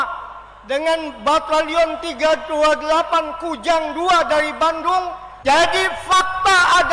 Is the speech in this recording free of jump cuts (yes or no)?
no